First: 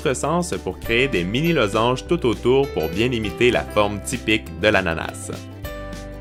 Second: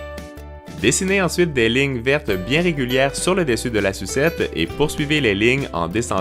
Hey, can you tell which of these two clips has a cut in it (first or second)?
second